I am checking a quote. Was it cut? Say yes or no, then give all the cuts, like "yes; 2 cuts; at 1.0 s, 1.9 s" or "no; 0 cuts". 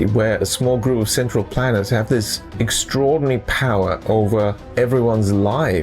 yes; 2 cuts; at 2.4 s, 4.6 s